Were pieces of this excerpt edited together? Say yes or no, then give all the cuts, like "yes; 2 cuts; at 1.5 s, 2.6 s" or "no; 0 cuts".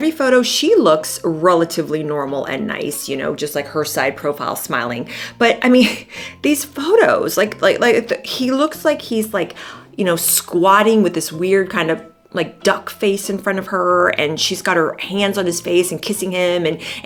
no; 0 cuts